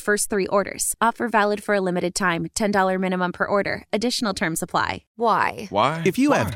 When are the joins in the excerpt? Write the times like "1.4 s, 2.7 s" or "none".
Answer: 5.0 s